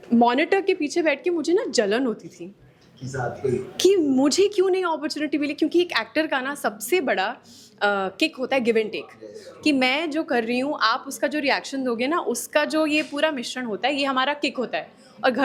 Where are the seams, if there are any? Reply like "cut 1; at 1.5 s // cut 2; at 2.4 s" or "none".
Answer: none